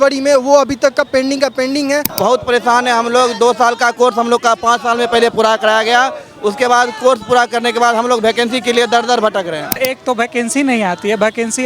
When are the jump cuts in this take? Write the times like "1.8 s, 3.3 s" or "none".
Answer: 2.1 s, 9.7 s